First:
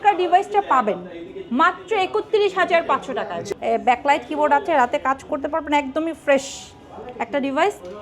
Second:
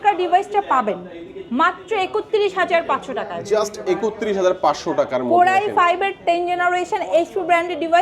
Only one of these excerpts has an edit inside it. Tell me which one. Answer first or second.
first